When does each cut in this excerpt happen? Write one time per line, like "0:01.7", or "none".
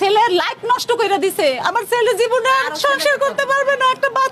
none

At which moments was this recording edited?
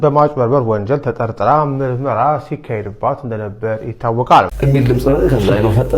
0:04.5

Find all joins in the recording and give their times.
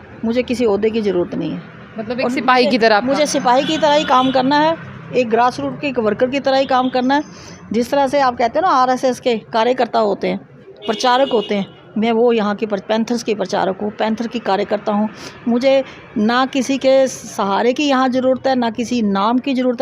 none

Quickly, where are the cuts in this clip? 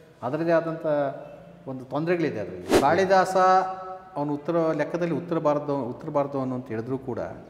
0:02.7

